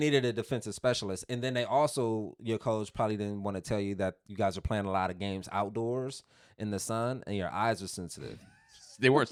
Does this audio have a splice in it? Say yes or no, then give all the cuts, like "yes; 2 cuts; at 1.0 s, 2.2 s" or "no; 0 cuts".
no; 0 cuts